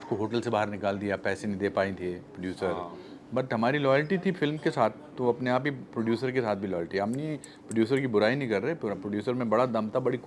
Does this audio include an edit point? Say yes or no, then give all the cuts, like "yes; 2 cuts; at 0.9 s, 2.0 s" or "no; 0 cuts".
no; 0 cuts